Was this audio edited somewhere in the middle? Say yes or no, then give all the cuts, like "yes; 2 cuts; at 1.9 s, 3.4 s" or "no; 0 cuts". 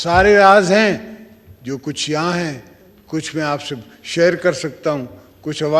no; 0 cuts